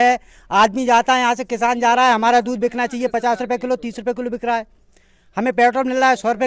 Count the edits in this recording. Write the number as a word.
zero